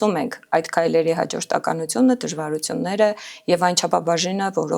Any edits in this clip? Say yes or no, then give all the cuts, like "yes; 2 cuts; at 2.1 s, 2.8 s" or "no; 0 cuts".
no; 0 cuts